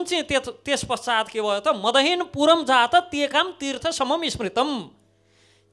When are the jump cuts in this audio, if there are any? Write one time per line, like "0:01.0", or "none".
none

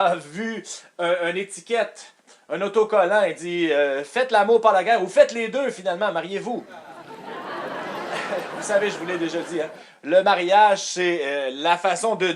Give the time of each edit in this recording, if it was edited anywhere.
none

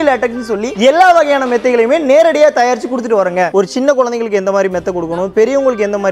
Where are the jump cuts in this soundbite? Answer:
0:03.5

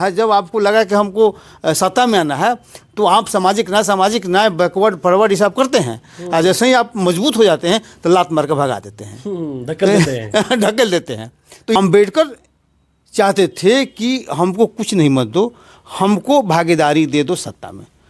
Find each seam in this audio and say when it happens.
0:11.8

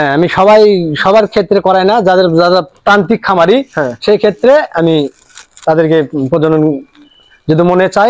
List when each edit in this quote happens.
none

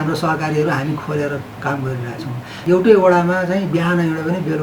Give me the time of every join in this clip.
0:02.5

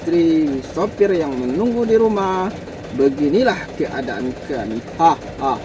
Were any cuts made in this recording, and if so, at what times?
none

